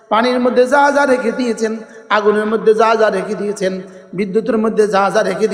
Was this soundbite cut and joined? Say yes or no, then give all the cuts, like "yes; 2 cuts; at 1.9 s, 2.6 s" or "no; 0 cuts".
no; 0 cuts